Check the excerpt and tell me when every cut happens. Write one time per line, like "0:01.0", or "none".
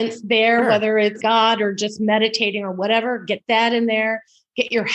0:01.2